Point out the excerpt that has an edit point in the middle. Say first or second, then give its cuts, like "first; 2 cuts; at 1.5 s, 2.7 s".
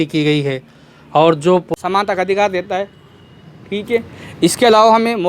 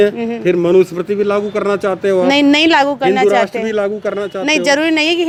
first; 1 cut; at 1.7 s